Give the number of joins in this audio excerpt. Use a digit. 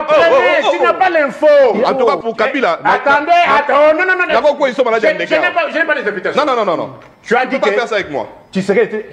1